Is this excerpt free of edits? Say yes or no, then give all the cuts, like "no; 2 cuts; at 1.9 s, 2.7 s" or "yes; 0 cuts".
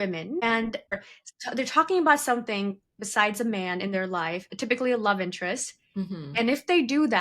no; 1 cut; at 1.0 s